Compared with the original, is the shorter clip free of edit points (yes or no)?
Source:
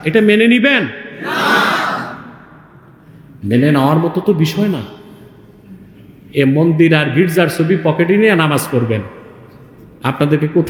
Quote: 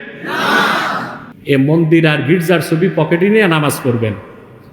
no